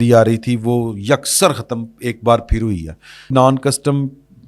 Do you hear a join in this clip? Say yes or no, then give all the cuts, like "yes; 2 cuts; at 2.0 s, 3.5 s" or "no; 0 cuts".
yes; 1 cut; at 3.3 s